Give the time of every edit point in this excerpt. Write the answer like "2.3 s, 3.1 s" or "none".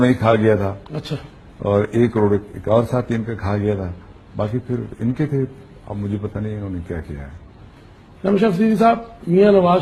none